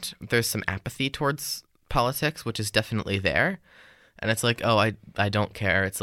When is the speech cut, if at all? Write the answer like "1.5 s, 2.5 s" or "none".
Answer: none